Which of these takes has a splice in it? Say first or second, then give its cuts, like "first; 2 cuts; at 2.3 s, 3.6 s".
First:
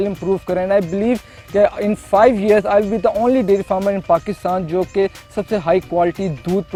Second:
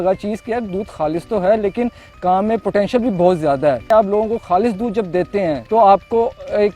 second; 2 cuts; at 3.8 s, 5.6 s